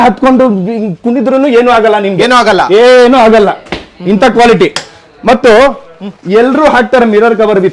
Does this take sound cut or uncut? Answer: uncut